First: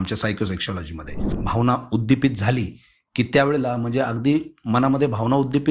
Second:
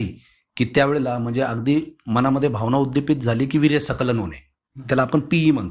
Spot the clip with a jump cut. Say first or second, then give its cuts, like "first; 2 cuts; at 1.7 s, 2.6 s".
first; 1 cut; at 1.3 s